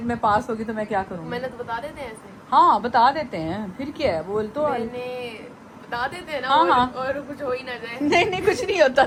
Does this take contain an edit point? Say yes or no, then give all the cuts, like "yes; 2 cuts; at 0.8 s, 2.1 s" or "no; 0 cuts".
no; 0 cuts